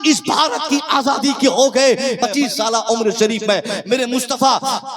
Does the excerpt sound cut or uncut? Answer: cut